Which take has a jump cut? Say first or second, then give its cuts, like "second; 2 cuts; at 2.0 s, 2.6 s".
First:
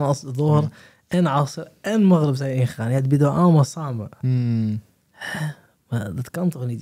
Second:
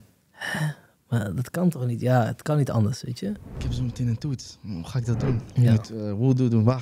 second; 1 cut; at 3.6 s